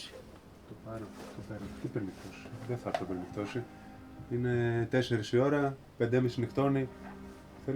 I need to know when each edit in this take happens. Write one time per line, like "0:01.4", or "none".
none